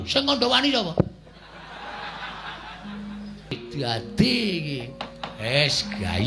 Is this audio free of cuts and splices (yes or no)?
no